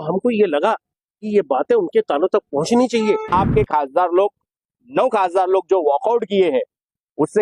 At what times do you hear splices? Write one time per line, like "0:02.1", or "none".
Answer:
0:03.3